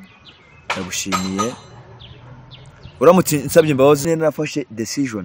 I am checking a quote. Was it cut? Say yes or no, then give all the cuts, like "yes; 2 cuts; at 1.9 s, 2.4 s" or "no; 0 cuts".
yes; 1 cut; at 4.0 s